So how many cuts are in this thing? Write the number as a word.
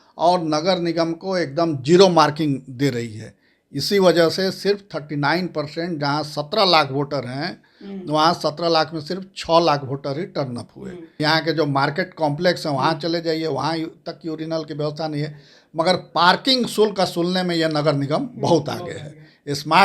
one